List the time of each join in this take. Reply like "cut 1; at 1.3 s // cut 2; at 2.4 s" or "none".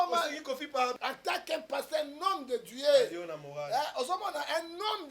cut 1; at 0.9 s